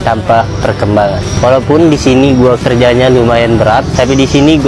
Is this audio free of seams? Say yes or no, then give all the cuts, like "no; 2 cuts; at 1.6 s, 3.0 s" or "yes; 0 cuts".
yes; 0 cuts